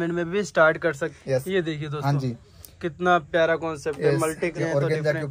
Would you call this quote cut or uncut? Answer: cut